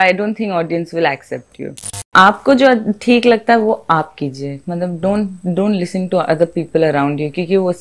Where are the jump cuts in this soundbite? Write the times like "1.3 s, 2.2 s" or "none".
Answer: 2.1 s